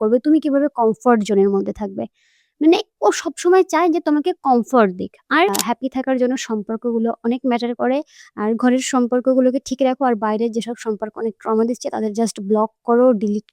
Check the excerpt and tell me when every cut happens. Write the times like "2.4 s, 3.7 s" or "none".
5.5 s